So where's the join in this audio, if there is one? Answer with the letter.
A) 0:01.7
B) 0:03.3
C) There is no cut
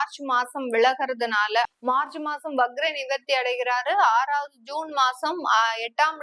A